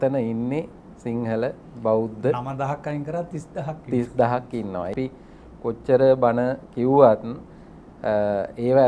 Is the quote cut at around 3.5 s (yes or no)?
no